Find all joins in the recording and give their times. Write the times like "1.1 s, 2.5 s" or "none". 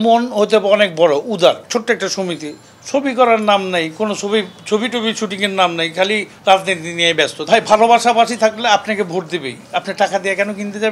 1.6 s, 7.4 s